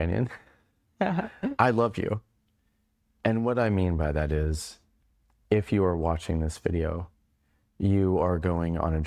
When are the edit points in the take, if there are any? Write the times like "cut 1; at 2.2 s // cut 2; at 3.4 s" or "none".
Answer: none